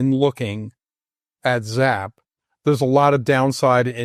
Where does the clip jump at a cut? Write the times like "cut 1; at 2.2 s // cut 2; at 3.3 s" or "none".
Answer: none